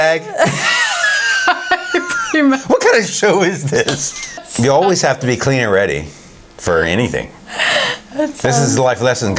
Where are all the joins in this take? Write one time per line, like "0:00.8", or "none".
0:04.5